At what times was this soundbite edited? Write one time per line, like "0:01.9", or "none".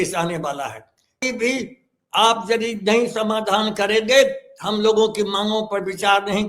0:01.2